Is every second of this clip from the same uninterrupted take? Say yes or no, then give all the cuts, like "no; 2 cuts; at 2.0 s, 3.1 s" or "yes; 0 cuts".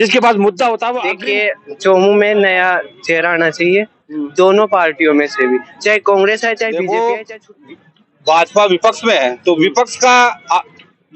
no; 2 cuts; at 1.1 s, 6.8 s